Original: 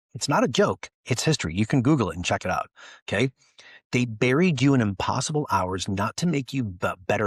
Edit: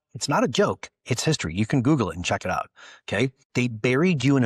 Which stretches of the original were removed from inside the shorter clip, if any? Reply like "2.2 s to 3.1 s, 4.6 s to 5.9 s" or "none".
3.4 s to 3.8 s